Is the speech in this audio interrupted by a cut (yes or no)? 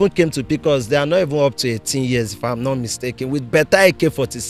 no